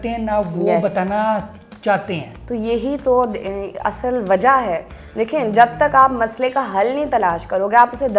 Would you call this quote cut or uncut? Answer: uncut